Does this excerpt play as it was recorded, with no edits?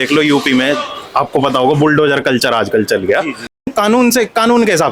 no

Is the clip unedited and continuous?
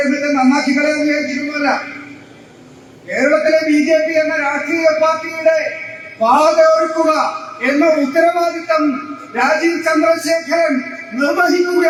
yes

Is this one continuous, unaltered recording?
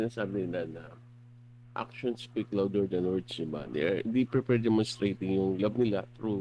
yes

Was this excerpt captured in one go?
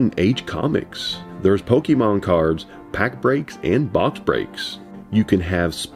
yes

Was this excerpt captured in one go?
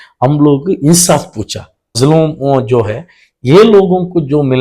no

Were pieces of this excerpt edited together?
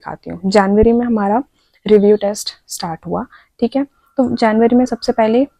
no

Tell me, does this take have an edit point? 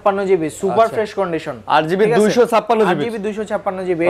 no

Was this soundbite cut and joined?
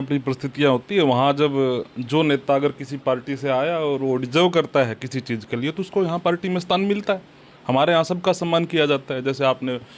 no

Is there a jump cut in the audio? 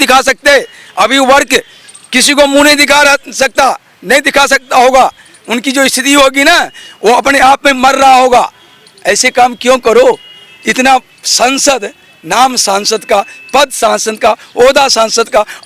no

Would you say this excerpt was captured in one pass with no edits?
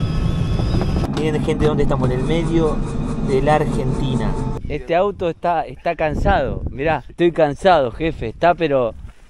no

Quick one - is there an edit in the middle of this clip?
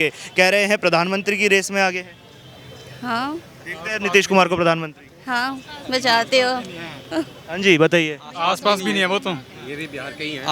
no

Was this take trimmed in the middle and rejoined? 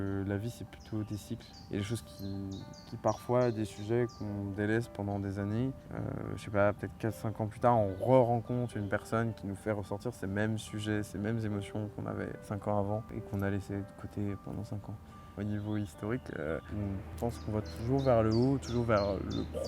yes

